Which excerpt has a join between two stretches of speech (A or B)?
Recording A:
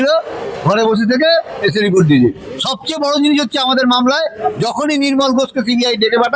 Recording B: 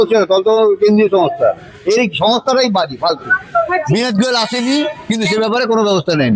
B